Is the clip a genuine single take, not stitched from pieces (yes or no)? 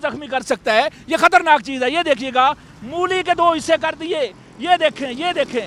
yes